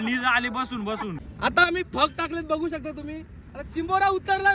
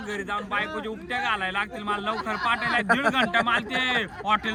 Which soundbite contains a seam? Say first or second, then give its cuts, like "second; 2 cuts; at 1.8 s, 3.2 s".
first; 1 cut; at 1.2 s